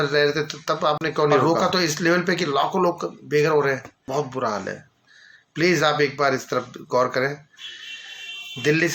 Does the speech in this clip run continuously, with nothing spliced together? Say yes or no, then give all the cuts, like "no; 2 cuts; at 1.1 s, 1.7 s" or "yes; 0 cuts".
no; 2 cuts; at 1.4 s, 3.9 s